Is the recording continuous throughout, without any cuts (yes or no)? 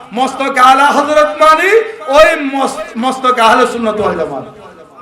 yes